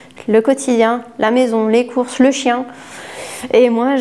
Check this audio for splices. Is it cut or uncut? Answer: uncut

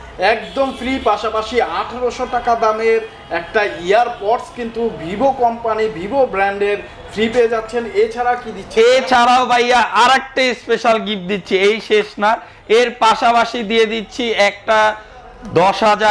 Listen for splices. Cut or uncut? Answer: uncut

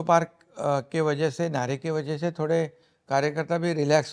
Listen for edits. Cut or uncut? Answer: uncut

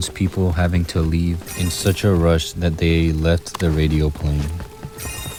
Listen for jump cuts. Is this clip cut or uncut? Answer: uncut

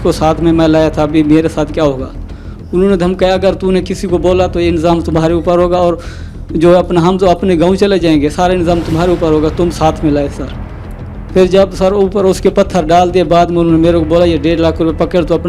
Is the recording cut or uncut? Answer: uncut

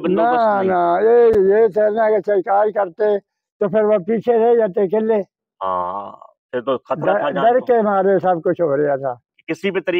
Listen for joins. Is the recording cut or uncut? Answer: uncut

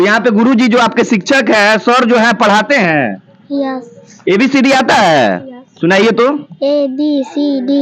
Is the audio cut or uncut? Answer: cut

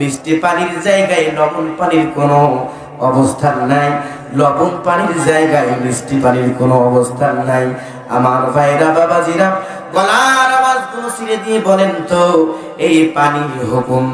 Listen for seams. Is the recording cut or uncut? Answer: uncut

